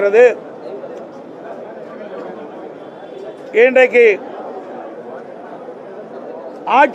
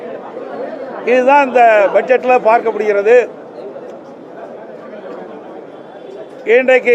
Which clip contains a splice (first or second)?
second